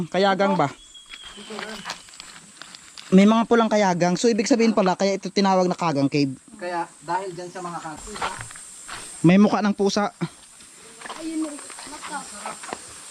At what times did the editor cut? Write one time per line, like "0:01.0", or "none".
0:08.0